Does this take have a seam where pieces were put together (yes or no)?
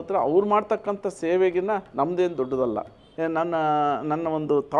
yes